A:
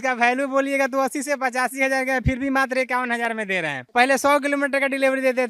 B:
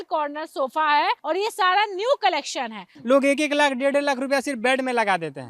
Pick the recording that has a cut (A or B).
B